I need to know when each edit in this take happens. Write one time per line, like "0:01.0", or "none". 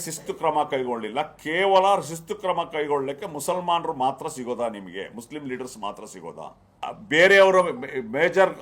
0:06.7